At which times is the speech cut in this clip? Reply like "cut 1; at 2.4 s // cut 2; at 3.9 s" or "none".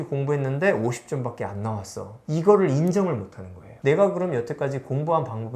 cut 1; at 2.1 s